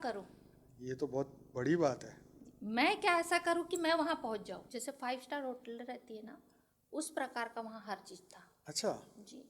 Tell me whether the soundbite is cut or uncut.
cut